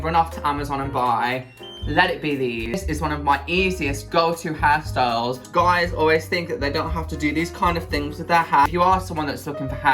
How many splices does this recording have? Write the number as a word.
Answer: three